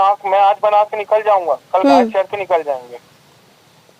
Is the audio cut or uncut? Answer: uncut